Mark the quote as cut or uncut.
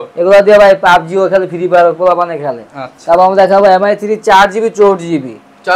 uncut